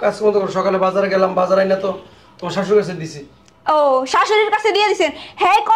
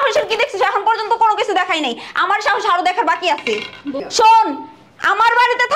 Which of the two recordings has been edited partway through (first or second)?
second